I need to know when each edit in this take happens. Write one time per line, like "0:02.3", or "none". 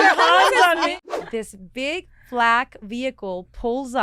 0:01.0